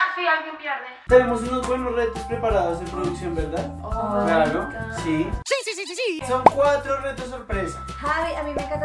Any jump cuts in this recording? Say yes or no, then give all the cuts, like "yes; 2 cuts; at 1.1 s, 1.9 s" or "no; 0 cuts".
no; 0 cuts